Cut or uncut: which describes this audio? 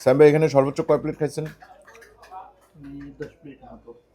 uncut